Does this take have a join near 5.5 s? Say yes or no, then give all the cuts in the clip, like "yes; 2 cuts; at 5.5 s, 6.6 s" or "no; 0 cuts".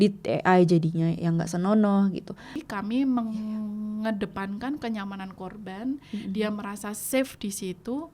no; 1 cut; at 2.6 s